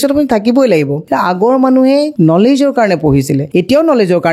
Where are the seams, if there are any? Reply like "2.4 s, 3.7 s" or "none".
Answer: 1.0 s, 2.1 s, 3.4 s